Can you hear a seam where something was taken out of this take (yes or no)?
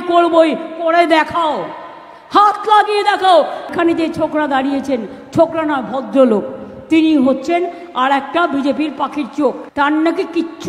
yes